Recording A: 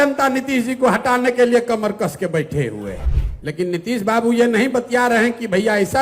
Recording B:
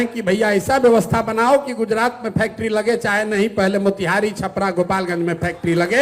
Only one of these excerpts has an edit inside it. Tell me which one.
A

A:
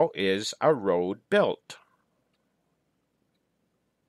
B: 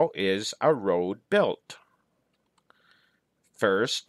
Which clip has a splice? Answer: B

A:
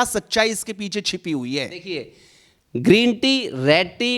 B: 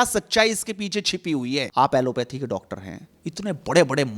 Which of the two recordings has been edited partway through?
B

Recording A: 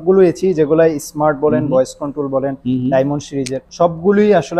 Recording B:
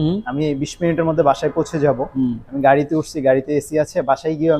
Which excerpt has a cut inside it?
A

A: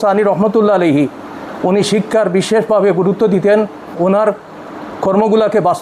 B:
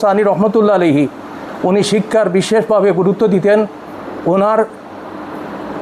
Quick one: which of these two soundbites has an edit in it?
A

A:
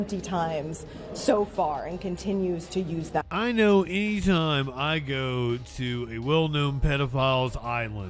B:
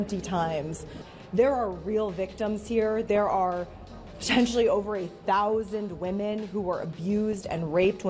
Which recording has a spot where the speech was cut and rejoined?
B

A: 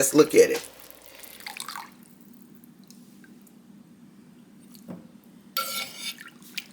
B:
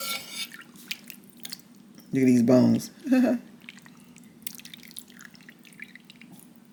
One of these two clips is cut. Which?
A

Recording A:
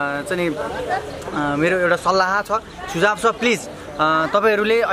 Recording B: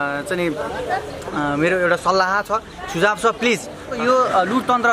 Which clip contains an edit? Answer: B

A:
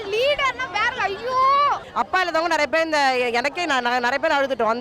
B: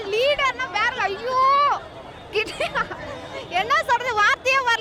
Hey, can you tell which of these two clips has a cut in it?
A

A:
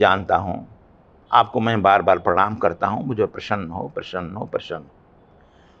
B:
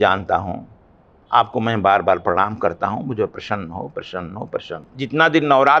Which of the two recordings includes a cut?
B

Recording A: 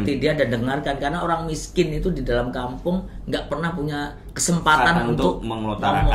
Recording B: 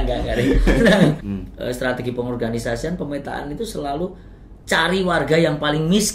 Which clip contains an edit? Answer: B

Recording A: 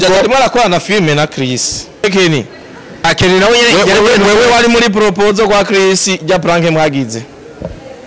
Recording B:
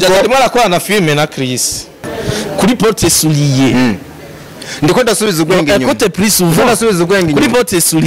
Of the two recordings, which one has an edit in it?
A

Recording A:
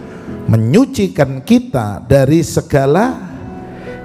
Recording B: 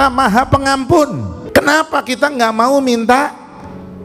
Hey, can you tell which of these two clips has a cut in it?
B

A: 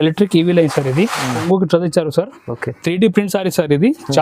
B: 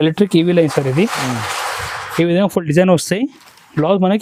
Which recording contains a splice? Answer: A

